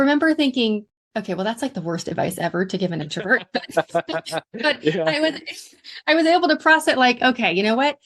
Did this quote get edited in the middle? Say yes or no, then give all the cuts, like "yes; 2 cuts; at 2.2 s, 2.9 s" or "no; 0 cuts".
yes; 1 cut; at 1.0 s